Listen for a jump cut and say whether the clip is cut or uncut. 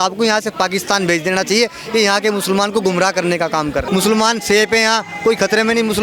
cut